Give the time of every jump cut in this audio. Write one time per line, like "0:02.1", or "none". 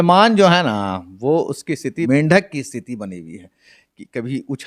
0:02.1